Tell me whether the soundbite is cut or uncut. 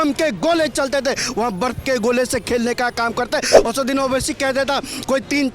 cut